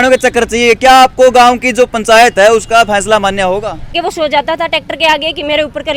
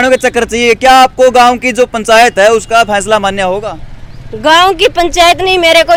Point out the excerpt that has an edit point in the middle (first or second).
first